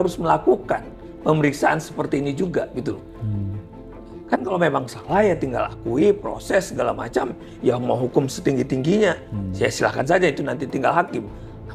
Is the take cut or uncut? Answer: uncut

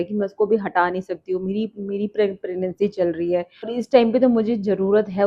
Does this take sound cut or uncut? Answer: uncut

